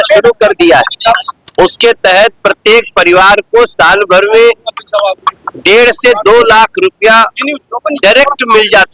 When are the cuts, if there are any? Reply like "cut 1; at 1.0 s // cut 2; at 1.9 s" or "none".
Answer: cut 1; at 1.4 s // cut 2; at 5.2 s